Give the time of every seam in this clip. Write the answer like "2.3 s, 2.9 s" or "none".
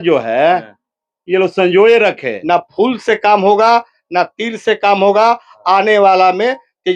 2.3 s